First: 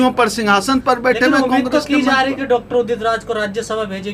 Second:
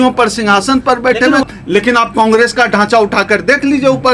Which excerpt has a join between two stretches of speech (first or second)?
second